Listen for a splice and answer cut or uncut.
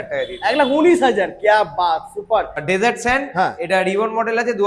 cut